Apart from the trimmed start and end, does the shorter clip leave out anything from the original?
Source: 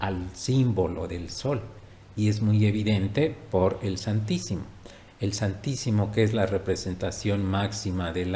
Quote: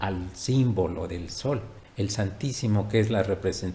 yes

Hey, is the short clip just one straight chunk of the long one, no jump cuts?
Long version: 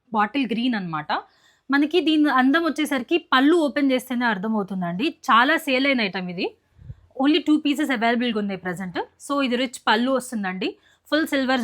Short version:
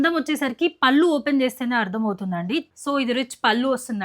no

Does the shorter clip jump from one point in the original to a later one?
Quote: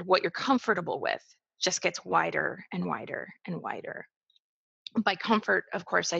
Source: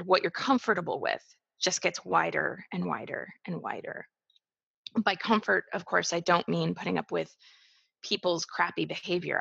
no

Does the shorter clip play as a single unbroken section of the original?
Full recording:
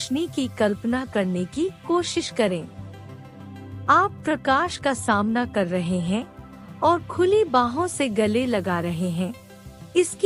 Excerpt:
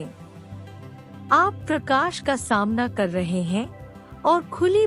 yes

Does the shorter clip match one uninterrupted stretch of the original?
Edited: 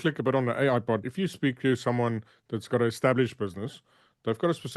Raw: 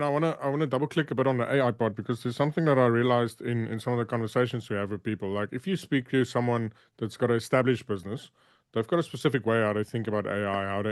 no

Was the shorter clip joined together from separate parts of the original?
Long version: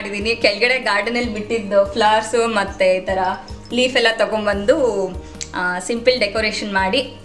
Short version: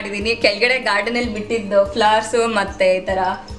no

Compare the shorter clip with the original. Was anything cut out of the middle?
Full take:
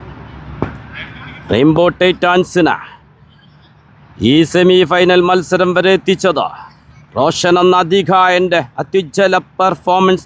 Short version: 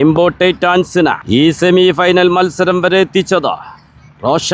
yes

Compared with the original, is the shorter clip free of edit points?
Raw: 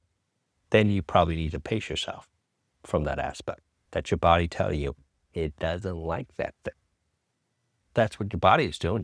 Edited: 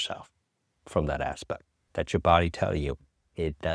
yes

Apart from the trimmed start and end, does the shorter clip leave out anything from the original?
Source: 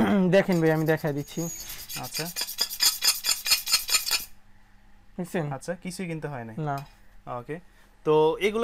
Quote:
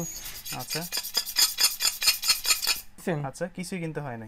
yes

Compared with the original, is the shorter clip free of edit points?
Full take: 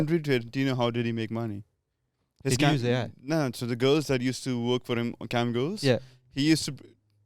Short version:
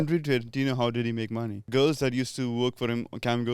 no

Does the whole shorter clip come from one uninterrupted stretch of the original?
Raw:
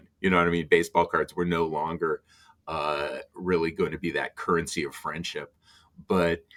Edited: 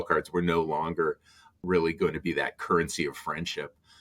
no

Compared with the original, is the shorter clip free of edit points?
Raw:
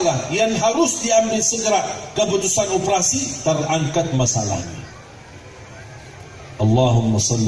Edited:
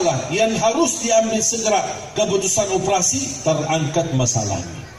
yes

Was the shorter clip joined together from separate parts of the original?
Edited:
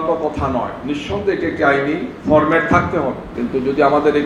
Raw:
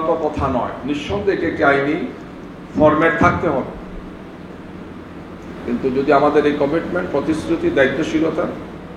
yes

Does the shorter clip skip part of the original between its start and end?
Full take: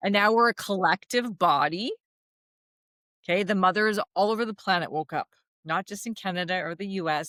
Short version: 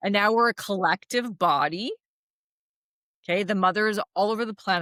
no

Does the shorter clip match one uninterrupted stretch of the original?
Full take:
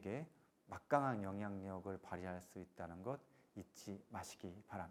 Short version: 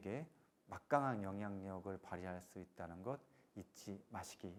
yes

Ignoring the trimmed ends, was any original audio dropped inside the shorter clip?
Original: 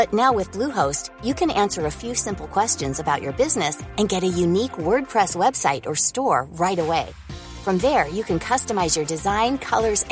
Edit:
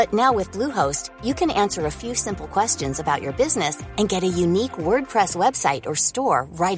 no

